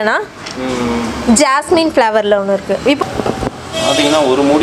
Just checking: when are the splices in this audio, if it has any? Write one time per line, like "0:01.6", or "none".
0:03.0